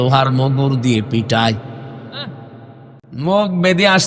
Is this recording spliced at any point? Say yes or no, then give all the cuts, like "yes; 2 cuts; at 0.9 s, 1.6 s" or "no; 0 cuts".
yes; 1 cut; at 2.9 s